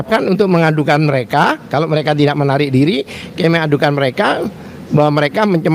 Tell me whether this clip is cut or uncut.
uncut